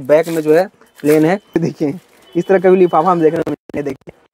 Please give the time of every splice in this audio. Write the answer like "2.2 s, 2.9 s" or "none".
1.6 s